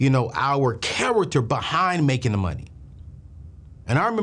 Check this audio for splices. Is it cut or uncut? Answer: uncut